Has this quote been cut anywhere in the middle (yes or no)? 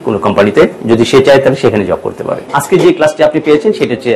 yes